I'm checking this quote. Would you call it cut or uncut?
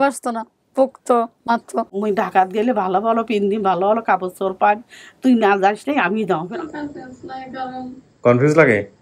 cut